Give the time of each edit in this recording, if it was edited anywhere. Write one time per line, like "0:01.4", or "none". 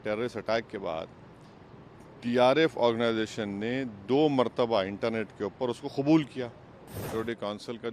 0:06.9